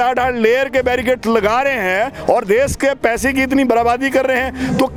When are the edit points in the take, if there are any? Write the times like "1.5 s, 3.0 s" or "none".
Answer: none